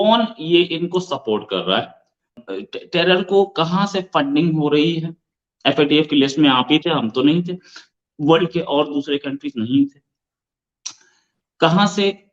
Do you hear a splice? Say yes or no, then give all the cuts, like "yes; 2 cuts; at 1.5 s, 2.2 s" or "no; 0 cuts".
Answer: yes; 1 cut; at 2.4 s